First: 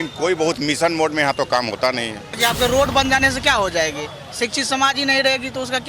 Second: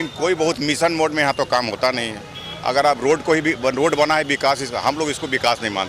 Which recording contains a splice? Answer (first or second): first